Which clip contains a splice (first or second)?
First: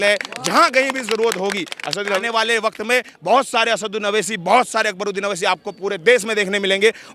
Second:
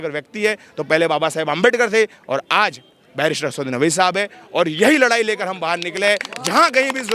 first